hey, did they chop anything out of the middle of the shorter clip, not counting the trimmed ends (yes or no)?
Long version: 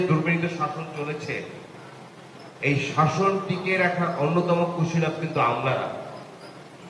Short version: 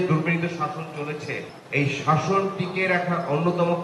yes